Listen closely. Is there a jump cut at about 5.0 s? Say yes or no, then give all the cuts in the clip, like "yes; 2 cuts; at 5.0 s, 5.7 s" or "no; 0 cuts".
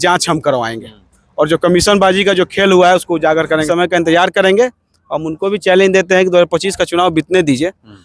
no; 1 cut; at 3.7 s